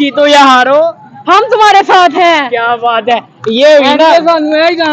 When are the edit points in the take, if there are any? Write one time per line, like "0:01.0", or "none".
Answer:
none